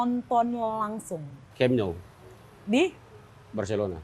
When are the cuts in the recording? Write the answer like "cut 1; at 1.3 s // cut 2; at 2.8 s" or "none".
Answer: cut 1; at 1.4 s